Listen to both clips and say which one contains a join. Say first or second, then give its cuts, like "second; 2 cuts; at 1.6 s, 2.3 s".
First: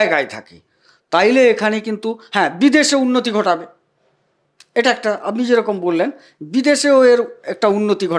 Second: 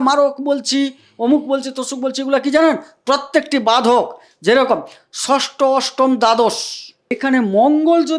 second; 1 cut; at 7.2 s